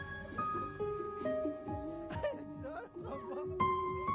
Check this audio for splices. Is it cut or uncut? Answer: uncut